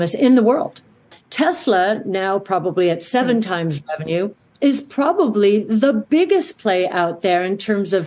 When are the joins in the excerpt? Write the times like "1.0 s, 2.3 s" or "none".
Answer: 1.0 s

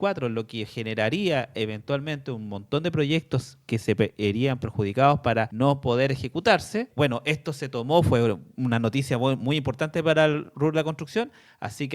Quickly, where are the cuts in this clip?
5.5 s, 6.9 s

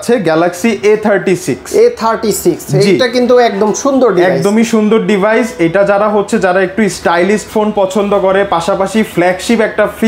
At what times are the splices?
none

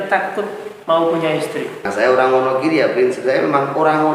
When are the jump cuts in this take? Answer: 1.8 s

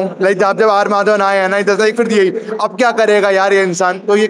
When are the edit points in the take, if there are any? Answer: none

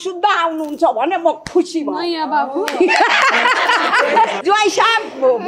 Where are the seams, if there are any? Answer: 4.4 s

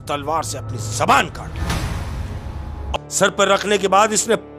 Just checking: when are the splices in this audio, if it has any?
2.9 s

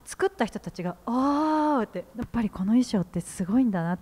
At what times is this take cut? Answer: 2.1 s

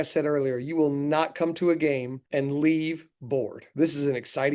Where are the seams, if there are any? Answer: 2.2 s, 3.6 s

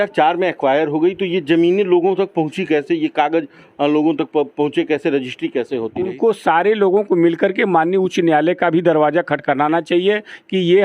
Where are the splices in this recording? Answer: 6.0 s

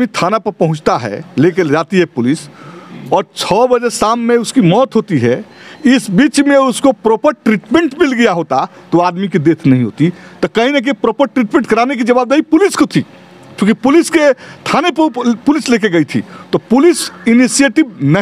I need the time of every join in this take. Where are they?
none

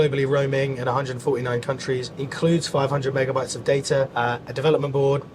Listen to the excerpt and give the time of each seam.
2.2 s, 4.1 s

